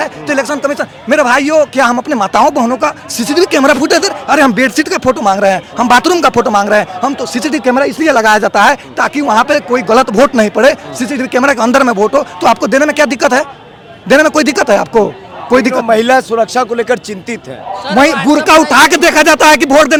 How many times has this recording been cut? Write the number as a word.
zero